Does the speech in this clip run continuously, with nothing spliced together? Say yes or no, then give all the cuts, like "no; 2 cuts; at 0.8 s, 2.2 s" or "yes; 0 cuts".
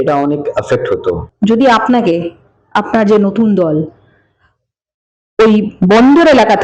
no; 1 cut; at 1.3 s